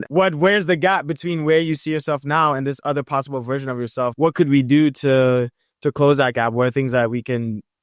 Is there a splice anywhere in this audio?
yes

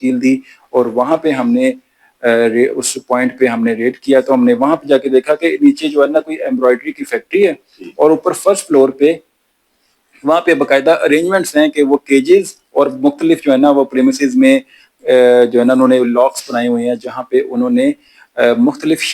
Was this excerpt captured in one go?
yes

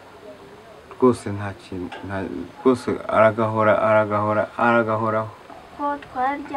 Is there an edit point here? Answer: yes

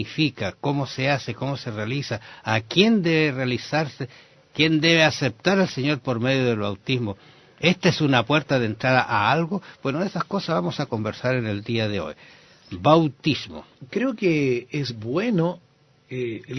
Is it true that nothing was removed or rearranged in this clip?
no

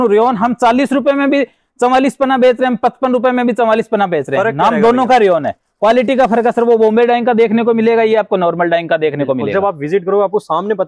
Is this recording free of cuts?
yes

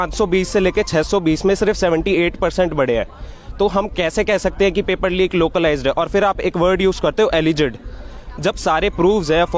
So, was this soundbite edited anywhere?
no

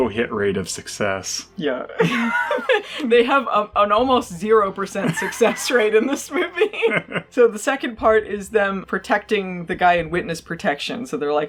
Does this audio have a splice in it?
no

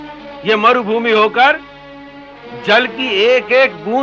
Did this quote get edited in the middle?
no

